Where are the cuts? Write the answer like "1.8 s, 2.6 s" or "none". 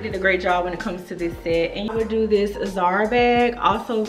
1.9 s